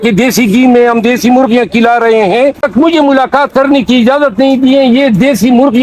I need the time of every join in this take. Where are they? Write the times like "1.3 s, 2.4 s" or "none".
2.6 s